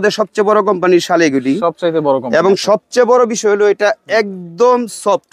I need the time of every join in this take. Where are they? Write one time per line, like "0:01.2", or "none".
none